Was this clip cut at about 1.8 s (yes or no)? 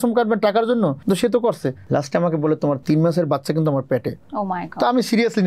yes